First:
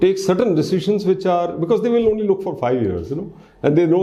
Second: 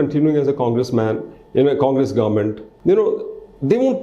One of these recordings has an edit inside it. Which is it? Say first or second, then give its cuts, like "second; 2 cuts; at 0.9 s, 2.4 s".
second; 1 cut; at 2.7 s